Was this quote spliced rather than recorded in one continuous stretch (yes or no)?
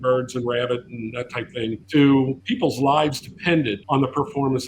yes